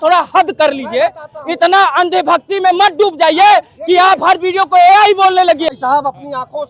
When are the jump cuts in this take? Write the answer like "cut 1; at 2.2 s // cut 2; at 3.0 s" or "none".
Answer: cut 1; at 5.7 s